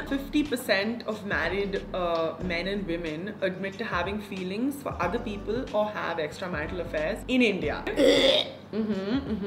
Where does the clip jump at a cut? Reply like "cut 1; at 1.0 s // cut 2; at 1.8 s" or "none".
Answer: none